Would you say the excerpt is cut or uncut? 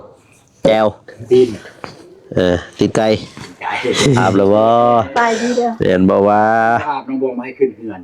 cut